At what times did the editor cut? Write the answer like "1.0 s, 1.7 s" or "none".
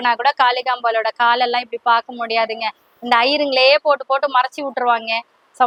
none